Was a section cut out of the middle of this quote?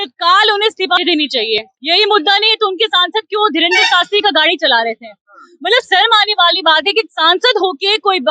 yes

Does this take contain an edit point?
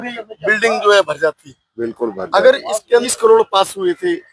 yes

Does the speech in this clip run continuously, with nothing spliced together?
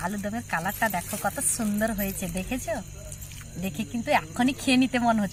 yes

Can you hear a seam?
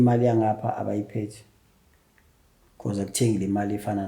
no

